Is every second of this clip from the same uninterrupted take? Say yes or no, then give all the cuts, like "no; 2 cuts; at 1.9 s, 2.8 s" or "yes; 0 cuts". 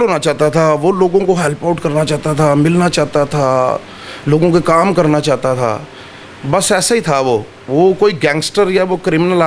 yes; 0 cuts